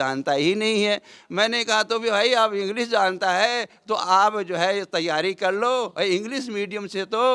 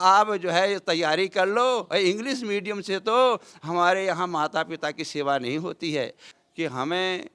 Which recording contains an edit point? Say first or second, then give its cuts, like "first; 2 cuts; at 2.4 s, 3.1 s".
second; 1 cut; at 6.3 s